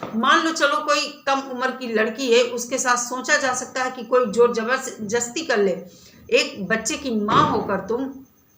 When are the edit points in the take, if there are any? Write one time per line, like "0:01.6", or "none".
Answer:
none